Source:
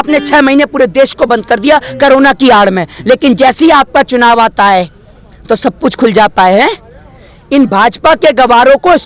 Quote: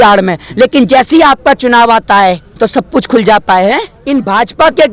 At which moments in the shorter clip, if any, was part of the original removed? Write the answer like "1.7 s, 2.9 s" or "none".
2.5 s, 3.9 s